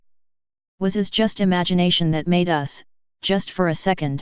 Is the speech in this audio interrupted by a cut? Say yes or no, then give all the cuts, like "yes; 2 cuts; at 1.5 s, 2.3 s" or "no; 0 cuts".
yes; 1 cut; at 2.4 s